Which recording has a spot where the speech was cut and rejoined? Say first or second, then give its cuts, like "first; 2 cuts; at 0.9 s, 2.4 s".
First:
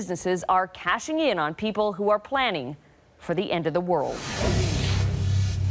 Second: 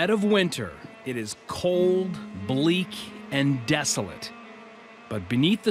first; 1 cut; at 4.1 s